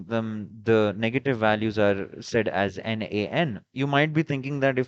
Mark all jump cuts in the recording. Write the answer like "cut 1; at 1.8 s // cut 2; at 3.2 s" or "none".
cut 1; at 3.6 s

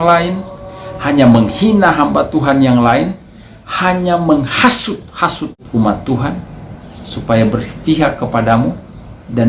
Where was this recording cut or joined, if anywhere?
cut 1; at 5.6 s

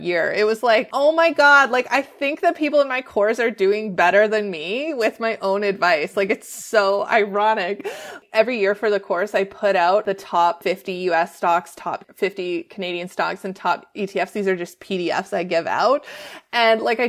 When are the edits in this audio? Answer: cut 1; at 0.9 s // cut 2; at 8.1 s // cut 3; at 10.5 s // cut 4; at 12.1 s

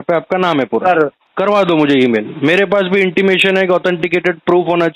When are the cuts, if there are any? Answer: cut 1; at 1.2 s

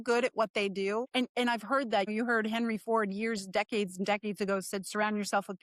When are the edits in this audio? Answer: cut 1; at 1.1 s // cut 2; at 2.1 s

